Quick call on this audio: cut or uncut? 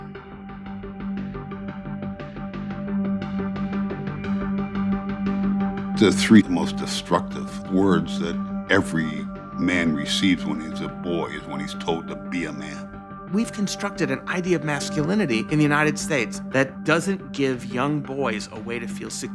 cut